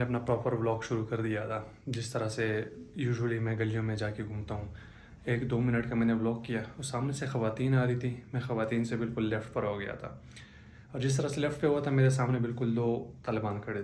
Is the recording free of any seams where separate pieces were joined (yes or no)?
yes